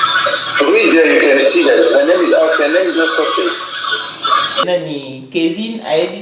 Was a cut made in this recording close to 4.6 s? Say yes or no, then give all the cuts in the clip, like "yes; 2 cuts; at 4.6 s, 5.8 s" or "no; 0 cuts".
yes; 1 cut; at 4.6 s